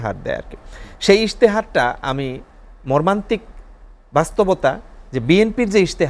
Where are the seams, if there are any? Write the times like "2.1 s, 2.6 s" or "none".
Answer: none